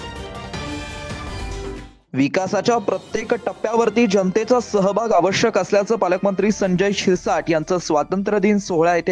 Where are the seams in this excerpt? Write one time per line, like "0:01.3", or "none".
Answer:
0:01.4